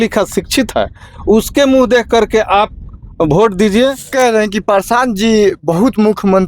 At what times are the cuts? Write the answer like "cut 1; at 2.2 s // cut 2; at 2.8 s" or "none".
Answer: cut 1; at 4.1 s